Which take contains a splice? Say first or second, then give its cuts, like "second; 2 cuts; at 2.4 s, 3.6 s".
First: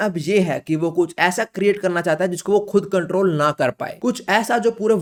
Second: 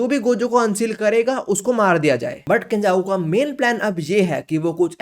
second; 1 cut; at 2.4 s